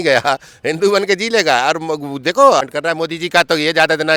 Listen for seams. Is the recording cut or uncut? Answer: cut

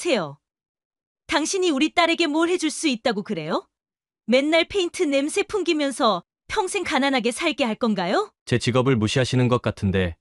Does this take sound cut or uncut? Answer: uncut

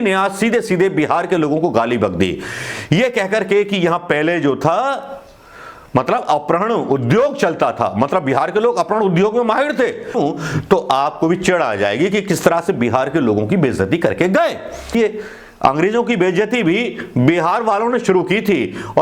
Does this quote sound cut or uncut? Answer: cut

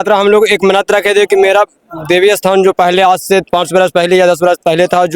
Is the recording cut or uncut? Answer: uncut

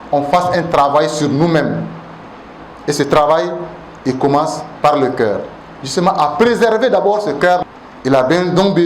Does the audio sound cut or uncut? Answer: cut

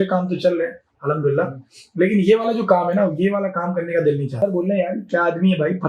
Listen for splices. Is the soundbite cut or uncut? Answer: cut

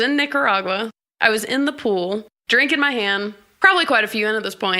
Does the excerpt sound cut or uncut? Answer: cut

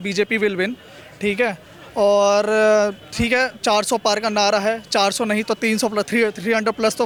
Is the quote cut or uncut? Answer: uncut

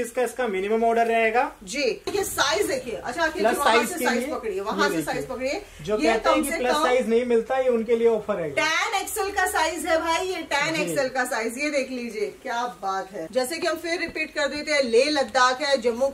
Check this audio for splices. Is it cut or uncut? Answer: cut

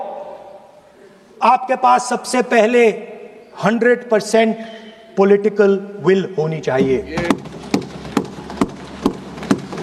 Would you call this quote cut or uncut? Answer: uncut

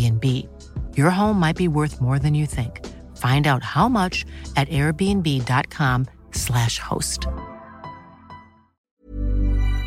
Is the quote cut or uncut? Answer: cut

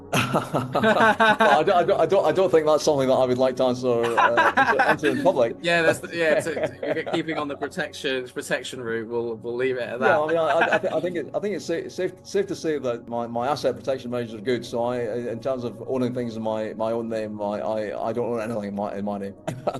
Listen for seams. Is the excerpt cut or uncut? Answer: uncut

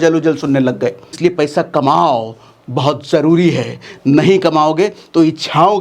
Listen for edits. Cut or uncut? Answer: cut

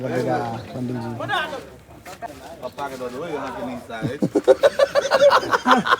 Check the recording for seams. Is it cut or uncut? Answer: cut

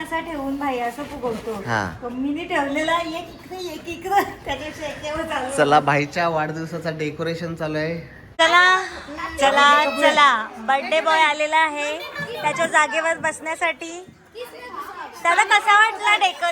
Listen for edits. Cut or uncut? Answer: cut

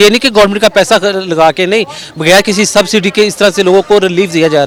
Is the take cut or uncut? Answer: uncut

